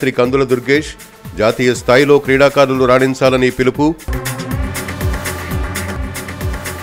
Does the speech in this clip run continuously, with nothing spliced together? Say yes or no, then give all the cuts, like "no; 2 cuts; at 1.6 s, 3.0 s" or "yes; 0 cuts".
yes; 0 cuts